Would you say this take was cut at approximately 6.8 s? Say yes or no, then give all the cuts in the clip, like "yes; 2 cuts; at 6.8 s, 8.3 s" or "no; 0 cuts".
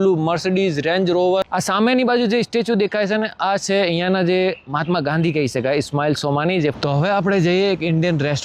yes; 2 cuts; at 1.5 s, 6.8 s